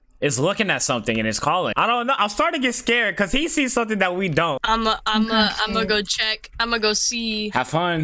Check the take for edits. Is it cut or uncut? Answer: cut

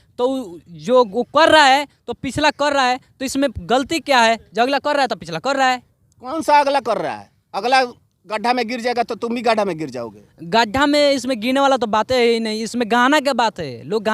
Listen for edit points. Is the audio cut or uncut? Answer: uncut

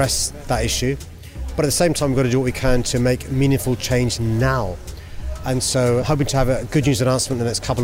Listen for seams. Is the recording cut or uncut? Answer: cut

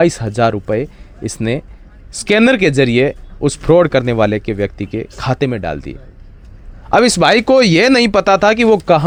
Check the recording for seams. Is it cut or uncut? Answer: uncut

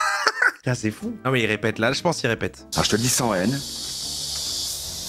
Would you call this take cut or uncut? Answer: cut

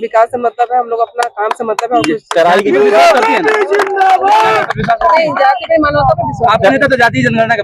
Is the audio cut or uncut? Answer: uncut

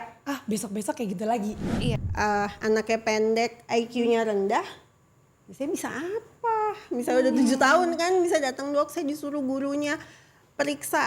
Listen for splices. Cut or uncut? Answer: cut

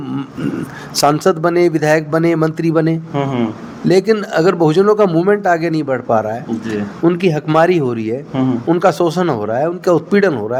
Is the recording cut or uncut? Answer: uncut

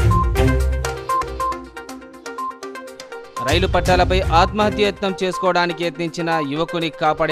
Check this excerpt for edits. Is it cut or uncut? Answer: cut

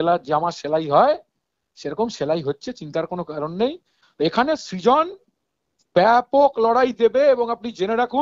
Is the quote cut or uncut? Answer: cut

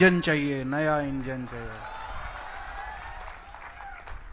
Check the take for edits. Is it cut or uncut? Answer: uncut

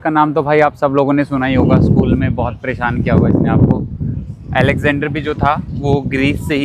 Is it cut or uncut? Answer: uncut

